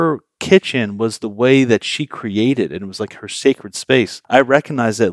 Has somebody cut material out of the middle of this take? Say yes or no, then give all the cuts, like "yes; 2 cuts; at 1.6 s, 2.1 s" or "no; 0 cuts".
yes; 1 cut; at 4.2 s